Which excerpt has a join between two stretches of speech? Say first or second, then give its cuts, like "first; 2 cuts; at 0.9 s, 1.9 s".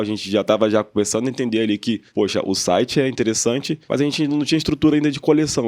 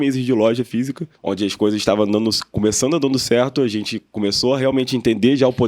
first; 2 cuts; at 2.1 s, 3.8 s